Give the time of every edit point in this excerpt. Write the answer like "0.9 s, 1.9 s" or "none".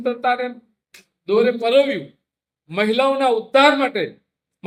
none